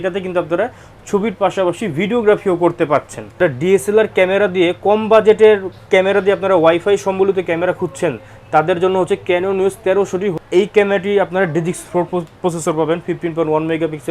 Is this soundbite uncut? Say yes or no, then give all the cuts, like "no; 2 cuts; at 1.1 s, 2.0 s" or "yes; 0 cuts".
no; 2 cuts; at 3.4 s, 10.4 s